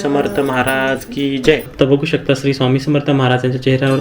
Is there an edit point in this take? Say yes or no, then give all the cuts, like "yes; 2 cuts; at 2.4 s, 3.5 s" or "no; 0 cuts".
yes; 1 cut; at 1.7 s